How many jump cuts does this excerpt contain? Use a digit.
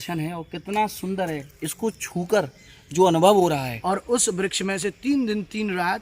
1